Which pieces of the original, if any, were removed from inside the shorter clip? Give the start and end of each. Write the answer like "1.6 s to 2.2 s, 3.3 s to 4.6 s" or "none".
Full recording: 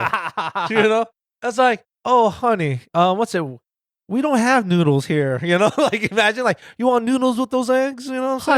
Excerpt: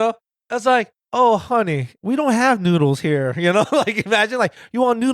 2.8 s to 3.9 s